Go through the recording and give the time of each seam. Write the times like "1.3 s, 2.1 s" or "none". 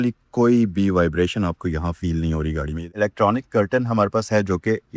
2.8 s